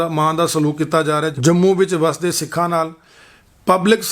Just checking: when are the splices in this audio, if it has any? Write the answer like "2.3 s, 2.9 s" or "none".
1.3 s